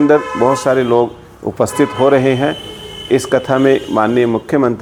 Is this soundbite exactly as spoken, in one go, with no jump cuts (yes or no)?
yes